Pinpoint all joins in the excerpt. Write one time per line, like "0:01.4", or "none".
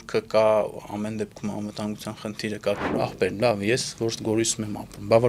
0:02.9